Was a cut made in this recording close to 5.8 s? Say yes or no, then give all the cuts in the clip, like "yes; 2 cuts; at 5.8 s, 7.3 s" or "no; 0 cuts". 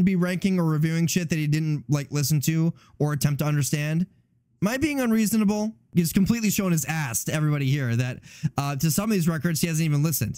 yes; 1 cut; at 5.8 s